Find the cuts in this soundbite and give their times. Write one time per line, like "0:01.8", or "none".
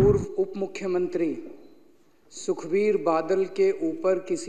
none

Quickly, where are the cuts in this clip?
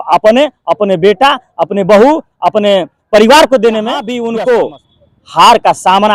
0:04.1

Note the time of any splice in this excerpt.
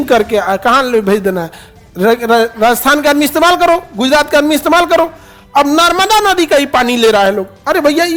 none

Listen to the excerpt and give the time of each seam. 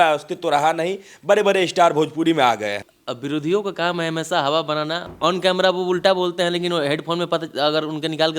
0:02.9
0:05.1

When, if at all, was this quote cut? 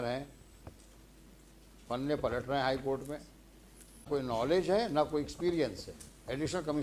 0:04.1

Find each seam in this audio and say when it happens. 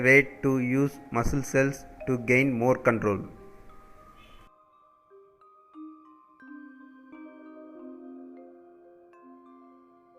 0:04.8

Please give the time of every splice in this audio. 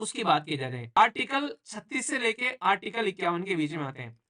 0:01.0

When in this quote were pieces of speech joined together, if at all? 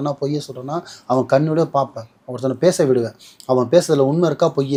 none

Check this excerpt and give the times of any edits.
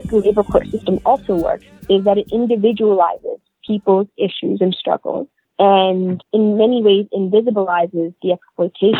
none

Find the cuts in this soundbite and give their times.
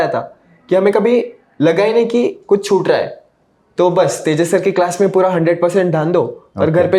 none

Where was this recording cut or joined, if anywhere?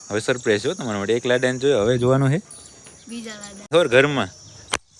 0:03.7

